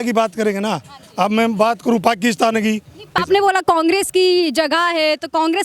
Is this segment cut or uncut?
cut